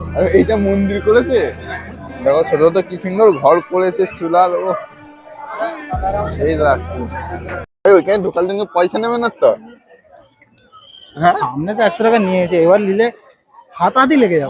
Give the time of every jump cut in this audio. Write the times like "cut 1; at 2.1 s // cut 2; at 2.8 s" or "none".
cut 1; at 7.9 s